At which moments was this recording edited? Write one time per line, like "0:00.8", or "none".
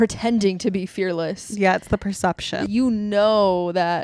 0:02.6